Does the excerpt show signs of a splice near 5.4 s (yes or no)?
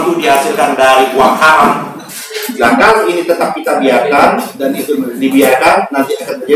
no